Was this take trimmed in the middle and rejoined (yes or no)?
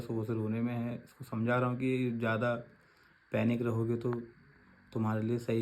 no